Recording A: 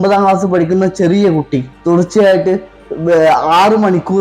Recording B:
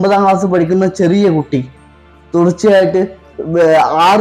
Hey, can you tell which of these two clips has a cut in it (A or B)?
A